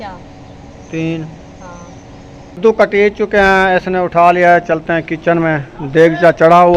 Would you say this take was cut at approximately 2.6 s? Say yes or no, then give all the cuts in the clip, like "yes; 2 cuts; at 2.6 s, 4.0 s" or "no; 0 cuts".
yes; 1 cut; at 2.6 s